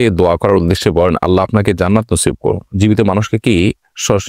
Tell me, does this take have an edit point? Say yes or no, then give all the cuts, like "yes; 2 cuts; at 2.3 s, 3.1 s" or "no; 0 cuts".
no; 0 cuts